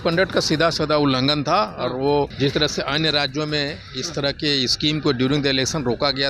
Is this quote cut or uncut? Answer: cut